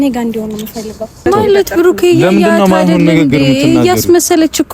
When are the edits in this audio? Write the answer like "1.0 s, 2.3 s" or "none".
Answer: 1.2 s